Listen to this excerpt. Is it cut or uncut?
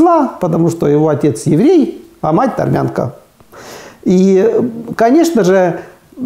uncut